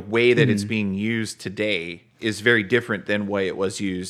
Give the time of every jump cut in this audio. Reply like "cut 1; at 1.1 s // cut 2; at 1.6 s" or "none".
cut 1; at 2.0 s